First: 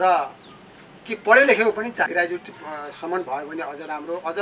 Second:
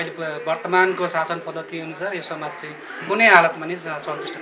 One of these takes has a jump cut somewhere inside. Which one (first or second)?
first